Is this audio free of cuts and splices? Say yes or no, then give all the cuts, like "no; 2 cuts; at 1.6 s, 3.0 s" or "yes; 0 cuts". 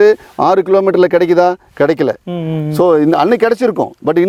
yes; 0 cuts